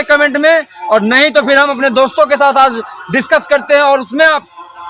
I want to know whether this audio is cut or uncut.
uncut